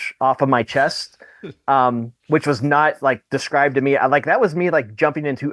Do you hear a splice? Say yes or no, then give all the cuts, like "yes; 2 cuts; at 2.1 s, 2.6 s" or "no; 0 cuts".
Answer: yes; 1 cut; at 2.1 s